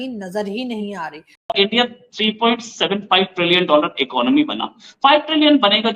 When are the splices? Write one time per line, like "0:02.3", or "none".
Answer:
0:01.5